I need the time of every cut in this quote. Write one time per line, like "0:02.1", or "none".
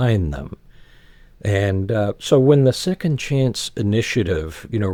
none